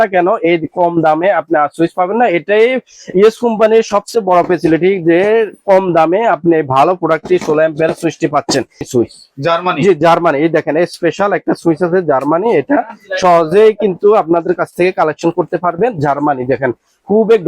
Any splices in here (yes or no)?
yes